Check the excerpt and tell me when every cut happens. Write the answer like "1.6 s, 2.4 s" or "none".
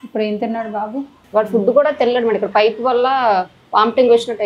1.1 s